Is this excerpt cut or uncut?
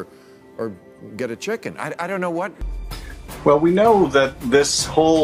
cut